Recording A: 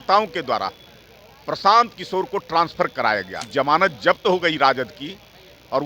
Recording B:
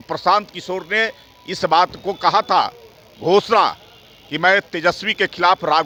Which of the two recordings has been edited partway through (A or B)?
A